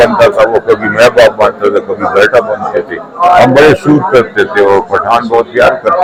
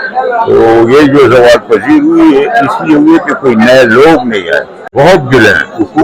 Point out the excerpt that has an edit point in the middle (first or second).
second